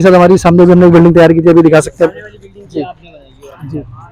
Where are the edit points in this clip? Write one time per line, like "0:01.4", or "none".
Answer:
none